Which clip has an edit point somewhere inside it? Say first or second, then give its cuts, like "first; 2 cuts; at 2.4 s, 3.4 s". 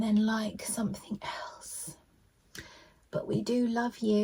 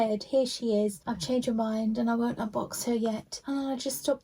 second; 2 cuts; at 1.1 s, 3.3 s